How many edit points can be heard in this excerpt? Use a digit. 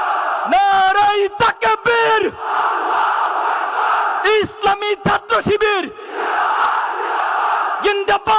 0